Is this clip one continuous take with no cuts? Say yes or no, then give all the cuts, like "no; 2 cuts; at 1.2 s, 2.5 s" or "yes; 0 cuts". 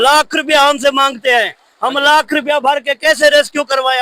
yes; 0 cuts